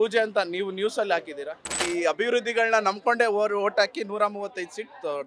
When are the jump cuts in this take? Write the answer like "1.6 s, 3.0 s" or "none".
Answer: 1.7 s

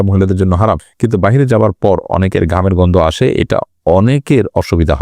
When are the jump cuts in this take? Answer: 0.9 s

